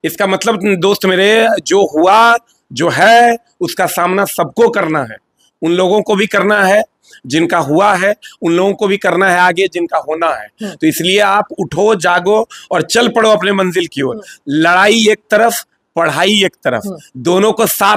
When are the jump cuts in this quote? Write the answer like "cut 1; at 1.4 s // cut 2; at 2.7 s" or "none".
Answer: none